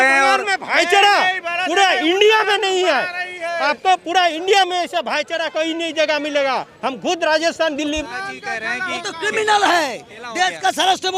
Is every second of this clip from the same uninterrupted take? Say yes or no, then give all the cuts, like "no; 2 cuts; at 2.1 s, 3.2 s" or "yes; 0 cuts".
no; 1 cut; at 8.0 s